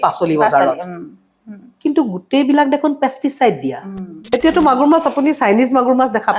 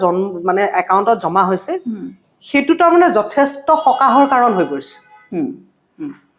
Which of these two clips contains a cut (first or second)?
first